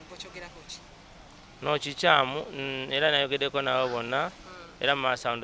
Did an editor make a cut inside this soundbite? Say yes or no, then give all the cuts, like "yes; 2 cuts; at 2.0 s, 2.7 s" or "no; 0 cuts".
no; 0 cuts